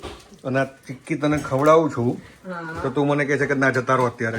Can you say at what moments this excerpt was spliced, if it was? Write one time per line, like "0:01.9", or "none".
none